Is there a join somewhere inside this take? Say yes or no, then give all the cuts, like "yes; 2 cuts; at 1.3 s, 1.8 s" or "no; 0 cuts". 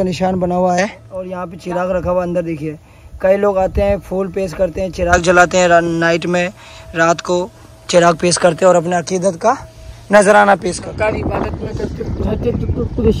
yes; 2 cuts; at 1.0 s, 10.8 s